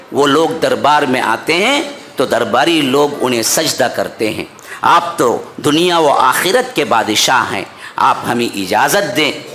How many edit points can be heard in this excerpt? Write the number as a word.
zero